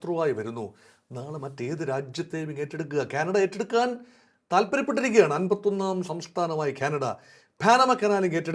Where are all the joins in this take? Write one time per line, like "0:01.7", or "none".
none